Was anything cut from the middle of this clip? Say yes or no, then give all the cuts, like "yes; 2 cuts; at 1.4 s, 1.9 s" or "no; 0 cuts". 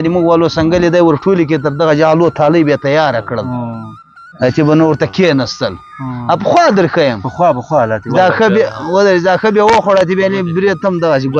no; 0 cuts